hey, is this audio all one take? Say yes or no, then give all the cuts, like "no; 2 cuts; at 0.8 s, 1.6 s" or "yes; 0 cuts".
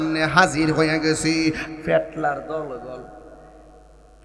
no; 1 cut; at 1.7 s